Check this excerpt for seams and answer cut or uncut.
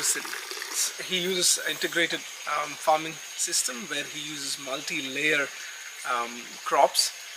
cut